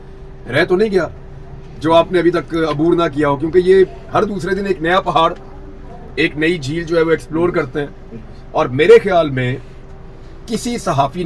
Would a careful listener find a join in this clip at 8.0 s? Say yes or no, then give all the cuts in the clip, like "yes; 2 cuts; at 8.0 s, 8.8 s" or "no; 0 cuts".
no; 0 cuts